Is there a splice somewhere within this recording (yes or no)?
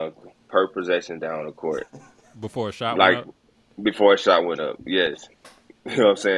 no